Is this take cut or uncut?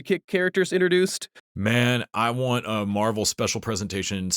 cut